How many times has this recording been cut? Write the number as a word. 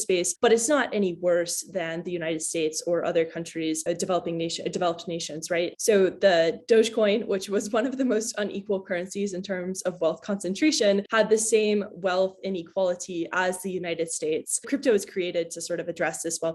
zero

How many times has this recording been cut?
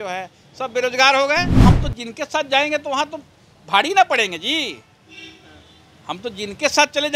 one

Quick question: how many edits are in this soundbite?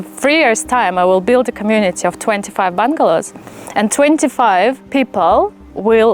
one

